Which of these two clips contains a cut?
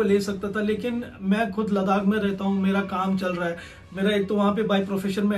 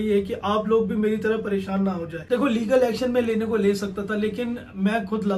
second; 1 cut; at 2.1 s

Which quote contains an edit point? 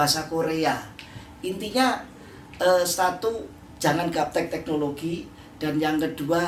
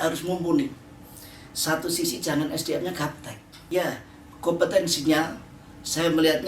second; 1 cut; at 3.7 s

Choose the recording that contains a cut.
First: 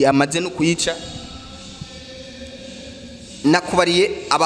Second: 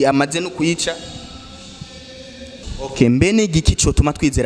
second; 1 cut; at 2.6 s

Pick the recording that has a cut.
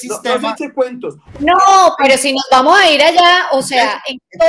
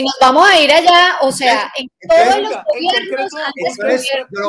first; 1 cut; at 1.3 s

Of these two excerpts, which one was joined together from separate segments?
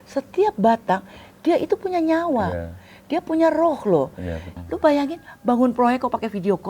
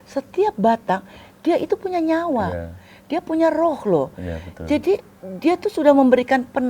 first; 1 cut; at 4.5 s

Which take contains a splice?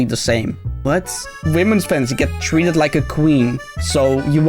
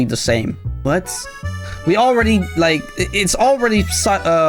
first; 1 cut; at 1.3 s

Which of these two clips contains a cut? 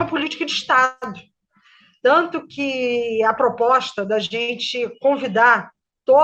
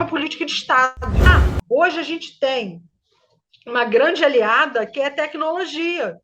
second; 1 cut; at 1.3 s

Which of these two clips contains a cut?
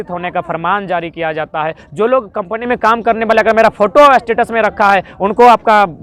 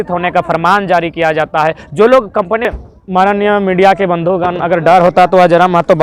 second; 1 cut; at 2.7 s

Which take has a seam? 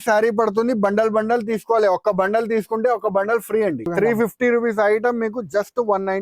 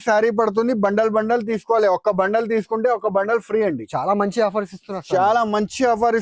first; 1 cut; at 3.8 s

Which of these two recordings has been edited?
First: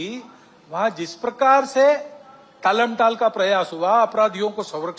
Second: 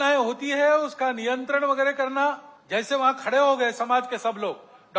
second; 1 cut; at 2.5 s

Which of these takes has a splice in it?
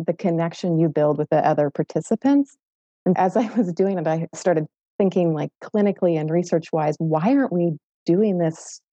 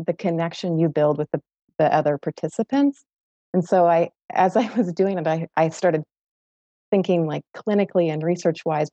first; 3 cuts; at 1.2 s, 3.2 s, 4.3 s

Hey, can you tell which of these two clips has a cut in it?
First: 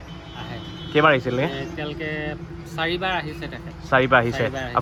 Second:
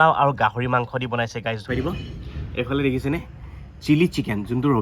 second; 1 cut; at 1.6 s

